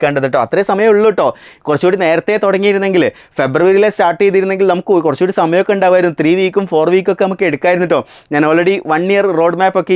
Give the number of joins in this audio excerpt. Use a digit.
0